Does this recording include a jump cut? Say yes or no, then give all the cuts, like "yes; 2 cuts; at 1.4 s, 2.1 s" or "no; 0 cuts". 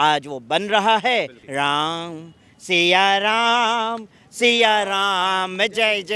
yes; 1 cut; at 1.4 s